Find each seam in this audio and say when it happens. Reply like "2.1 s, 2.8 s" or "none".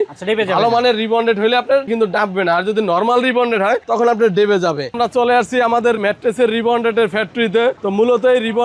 4.9 s, 6.0 s, 7.8 s